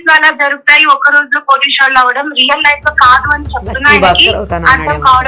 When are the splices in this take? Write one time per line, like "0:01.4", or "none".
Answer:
none